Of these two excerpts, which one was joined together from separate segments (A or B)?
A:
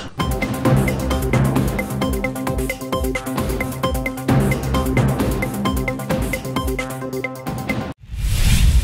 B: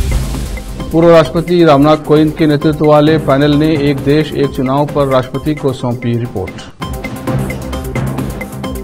A